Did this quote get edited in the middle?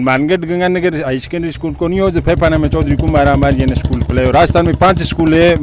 no; 0 cuts

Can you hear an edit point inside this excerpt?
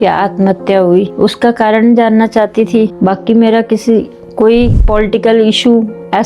yes; 3 cuts; at 1.1 s, 2.9 s, 4.8 s

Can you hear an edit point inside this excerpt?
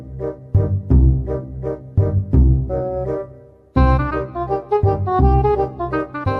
no; 0 cuts

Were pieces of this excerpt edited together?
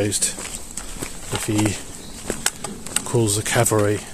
no; 0 cuts

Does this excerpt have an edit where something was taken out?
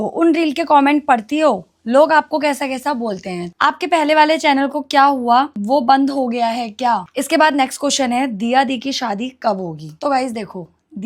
yes; 2 cuts; at 3.5 s, 7.1 s

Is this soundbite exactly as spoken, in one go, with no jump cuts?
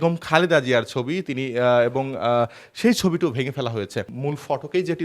no; 1 cut; at 4.1 s

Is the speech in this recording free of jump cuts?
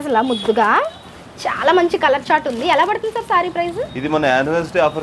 yes; 0 cuts

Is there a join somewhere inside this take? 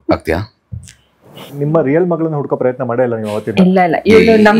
yes; 1 cut; at 1.4 s

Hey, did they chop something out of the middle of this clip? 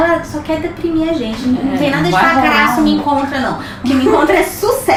no; 0 cuts

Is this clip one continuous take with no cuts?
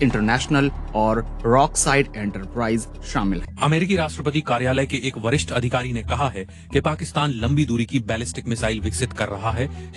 no; 1 cut; at 3.5 s

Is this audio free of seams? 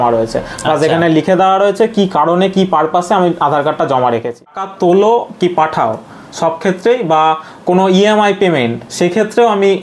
no; 1 cut; at 4.6 s

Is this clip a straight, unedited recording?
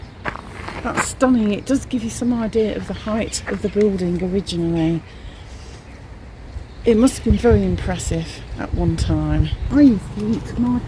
no; 1 cut; at 9.6 s

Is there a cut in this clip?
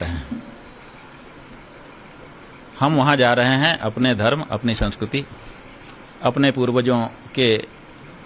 no; 0 cuts

